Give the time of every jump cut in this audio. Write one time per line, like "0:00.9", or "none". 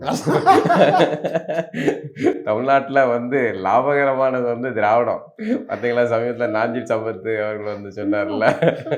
none